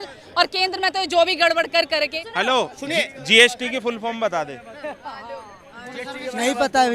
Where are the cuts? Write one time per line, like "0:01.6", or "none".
0:02.2

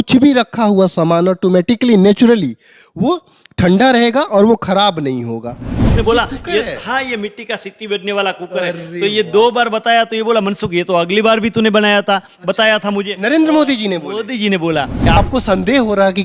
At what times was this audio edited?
0:05.9
0:15.2

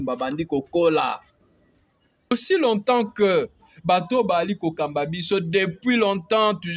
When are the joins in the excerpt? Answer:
0:02.3

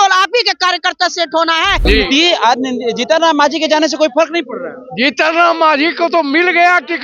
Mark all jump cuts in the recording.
0:01.9

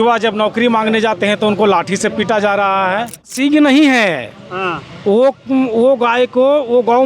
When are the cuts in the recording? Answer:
0:03.3

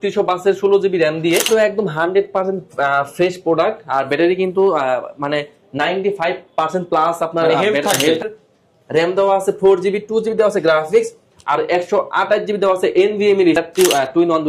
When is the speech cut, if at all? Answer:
0:01.5
0:08.2
0:13.6

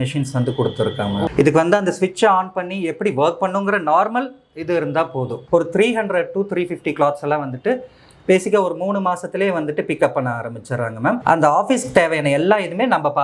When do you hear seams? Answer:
0:01.3
0:05.4
0:11.2

